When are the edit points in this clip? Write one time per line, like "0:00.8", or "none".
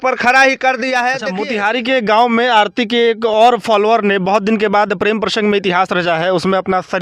0:01.3